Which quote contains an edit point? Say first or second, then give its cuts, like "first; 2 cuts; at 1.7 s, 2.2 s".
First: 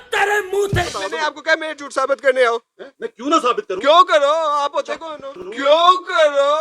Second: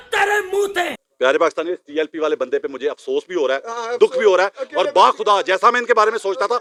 first; 1 cut; at 1.0 s